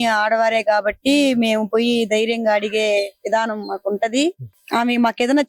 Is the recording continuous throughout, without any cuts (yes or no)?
no